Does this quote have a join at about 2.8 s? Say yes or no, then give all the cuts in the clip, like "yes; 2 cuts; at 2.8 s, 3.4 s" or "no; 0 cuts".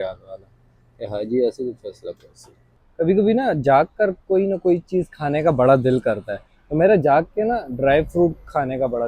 yes; 2 cuts; at 0.9 s, 2.8 s